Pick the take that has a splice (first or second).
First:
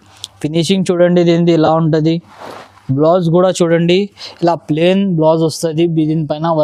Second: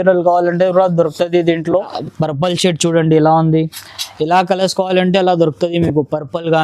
second